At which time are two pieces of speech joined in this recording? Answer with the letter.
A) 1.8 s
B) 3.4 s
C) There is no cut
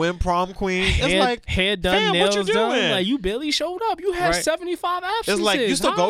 C